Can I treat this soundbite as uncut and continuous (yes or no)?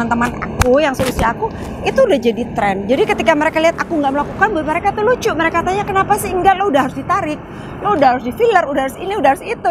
yes